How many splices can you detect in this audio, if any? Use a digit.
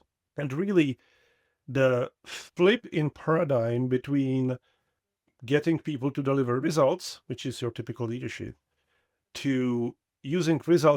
1